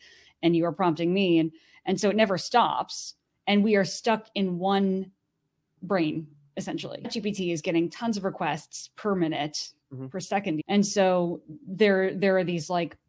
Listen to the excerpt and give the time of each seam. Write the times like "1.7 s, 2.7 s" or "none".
7.1 s, 10.6 s